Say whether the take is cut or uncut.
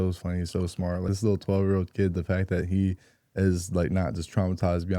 cut